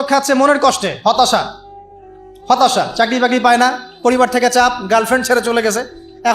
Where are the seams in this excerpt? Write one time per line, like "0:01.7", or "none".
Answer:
none